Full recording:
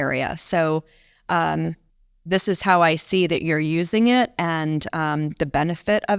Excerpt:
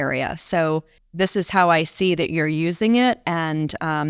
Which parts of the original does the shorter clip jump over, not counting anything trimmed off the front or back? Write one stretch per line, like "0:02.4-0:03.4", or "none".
0:01.0-0:02.1